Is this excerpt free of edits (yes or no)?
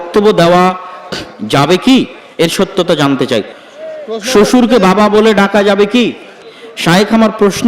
no